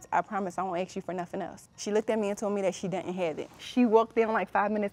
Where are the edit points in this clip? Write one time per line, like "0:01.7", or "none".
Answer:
0:01.6
0:03.6

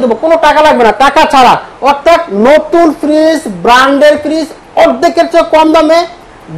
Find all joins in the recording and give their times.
none

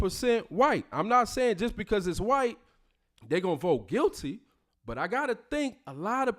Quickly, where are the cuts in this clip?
0:00.9

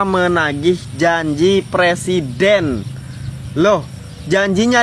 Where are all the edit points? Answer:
none

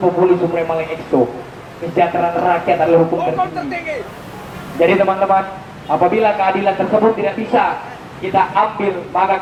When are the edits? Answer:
none

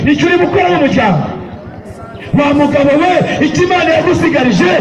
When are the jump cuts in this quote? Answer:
none

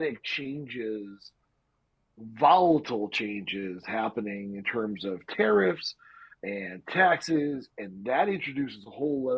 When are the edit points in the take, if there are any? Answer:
none

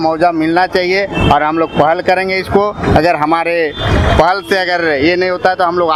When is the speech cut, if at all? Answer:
none

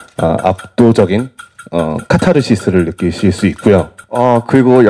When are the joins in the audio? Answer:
0:04.0

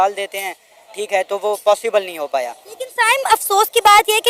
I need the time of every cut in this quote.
none

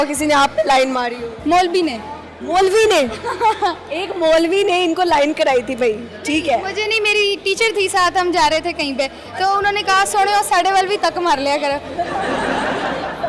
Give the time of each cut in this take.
none

